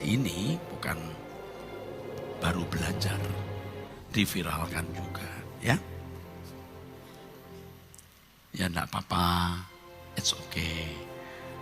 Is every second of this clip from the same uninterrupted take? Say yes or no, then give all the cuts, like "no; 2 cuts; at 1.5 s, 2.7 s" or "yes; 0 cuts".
no; 1 cut; at 3.9 s